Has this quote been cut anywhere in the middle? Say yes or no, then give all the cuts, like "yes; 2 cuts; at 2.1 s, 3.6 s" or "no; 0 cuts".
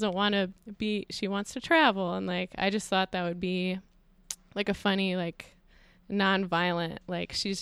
no; 0 cuts